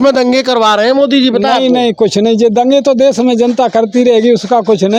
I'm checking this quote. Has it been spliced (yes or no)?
no